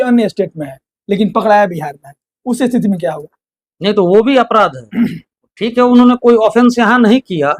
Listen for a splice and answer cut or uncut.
uncut